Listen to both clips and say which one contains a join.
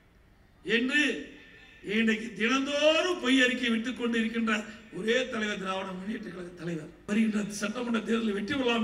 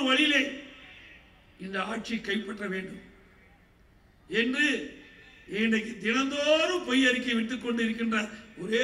first; 1 cut; at 7.1 s

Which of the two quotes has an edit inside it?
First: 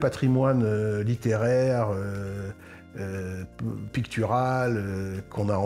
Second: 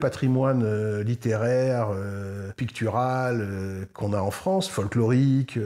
second; 1 cut; at 2.6 s

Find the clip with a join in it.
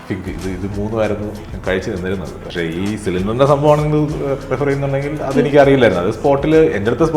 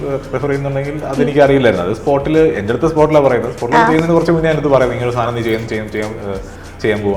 first; 2 cuts; at 1.5 s, 2.4 s

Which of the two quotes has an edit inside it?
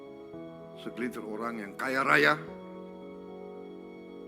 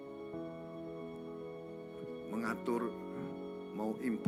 first; 2 cuts; at 0.8 s, 2.9 s

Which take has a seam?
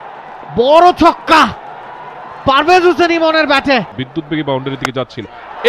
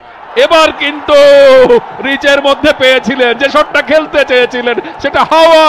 first; 1 cut; at 3.9 s

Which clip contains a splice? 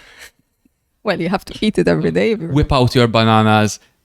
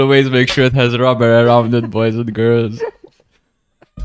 first; 1 cut; at 2.4 s

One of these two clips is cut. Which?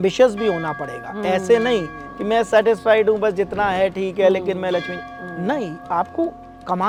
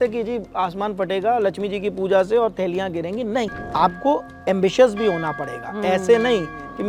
second; 1 cut; at 3.5 s

